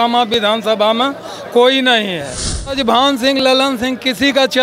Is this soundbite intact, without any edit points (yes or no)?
no